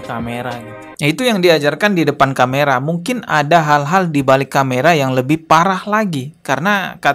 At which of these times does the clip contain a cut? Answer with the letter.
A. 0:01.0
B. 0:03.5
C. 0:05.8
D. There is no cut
A